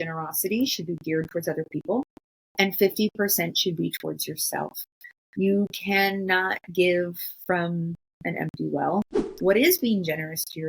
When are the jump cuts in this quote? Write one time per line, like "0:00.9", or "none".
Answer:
0:09.2